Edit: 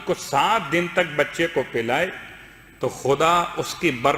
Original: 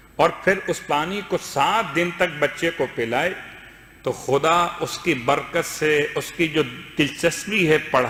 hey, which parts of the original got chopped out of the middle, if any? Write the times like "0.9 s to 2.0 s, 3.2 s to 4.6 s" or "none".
none

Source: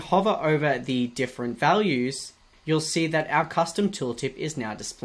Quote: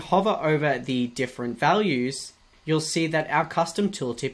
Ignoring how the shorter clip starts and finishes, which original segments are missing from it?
none

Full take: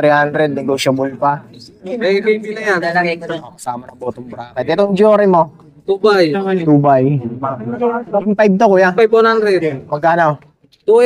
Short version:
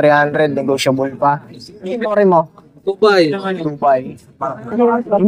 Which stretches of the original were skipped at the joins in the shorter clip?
2.1 s to 5.1 s

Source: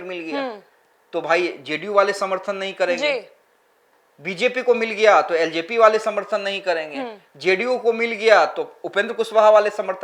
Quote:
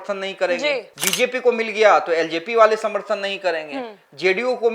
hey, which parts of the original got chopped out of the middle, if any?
3.4 s to 4.2 s

